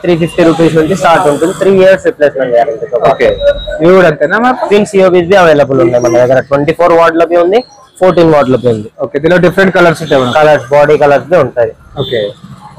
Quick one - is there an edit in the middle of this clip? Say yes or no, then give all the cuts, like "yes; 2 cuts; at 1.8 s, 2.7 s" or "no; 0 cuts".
no; 0 cuts